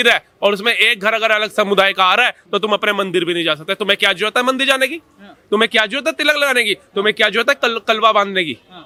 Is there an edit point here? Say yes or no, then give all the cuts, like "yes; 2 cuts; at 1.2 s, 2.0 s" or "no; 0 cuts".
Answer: no; 0 cuts